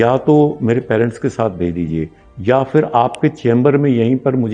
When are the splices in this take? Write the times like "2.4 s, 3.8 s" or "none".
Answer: none